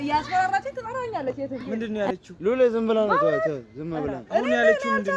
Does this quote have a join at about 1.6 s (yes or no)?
yes